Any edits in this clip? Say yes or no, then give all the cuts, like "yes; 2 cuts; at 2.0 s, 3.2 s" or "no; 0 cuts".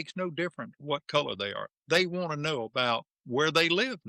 no; 0 cuts